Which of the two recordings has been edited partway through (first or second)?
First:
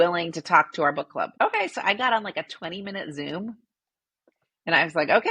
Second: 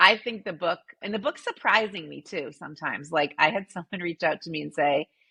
first